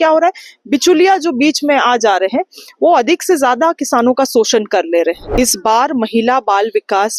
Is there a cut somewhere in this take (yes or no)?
yes